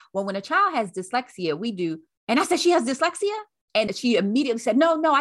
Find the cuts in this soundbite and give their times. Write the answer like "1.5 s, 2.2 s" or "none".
2.1 s, 3.9 s